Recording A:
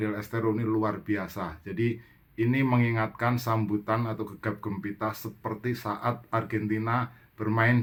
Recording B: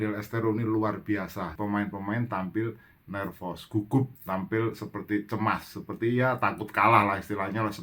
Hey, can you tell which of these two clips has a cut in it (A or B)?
B